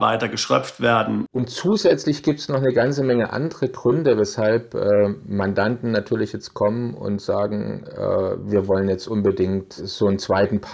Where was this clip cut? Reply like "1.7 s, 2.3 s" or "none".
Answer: 1.3 s, 9.9 s